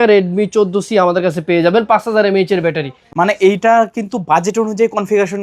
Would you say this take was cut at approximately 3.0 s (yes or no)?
yes